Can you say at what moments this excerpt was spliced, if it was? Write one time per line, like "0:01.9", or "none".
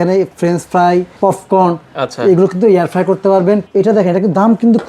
0:01.1
0:03.6

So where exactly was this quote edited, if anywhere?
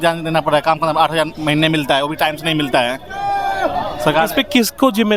none

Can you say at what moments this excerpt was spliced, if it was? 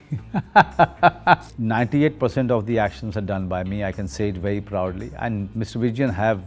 0:01.5

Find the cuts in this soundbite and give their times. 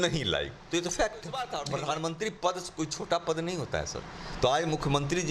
0:01.6

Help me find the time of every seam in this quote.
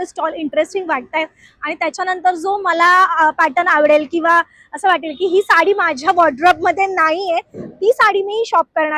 none

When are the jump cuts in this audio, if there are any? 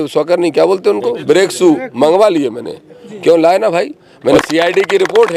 0:04.4

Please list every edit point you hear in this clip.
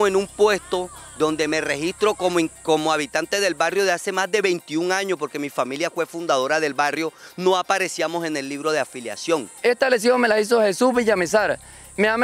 0:09.5

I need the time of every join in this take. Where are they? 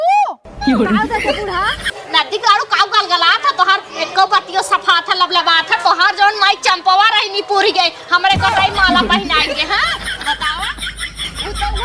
0:01.9

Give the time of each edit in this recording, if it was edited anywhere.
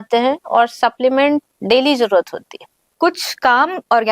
0:02.9

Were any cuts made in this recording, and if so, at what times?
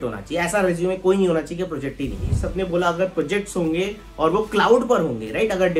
0:02.4

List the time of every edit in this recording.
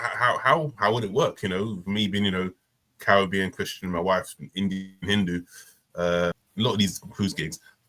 0:06.4

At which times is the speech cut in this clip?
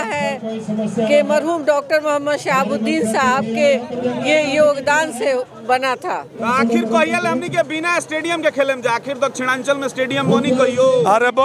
0:06.4

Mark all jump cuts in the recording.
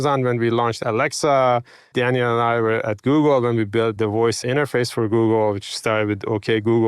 0:00.8
0:01.9
0:04.1

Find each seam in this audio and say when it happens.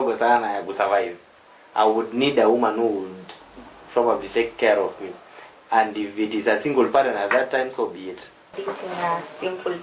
0:08.6

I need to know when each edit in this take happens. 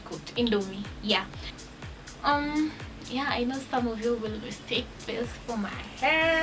0:01.6

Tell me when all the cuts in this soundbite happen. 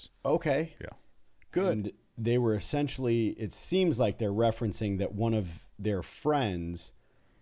0:01.8

